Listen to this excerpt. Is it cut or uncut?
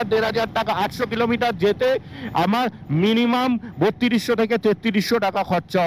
uncut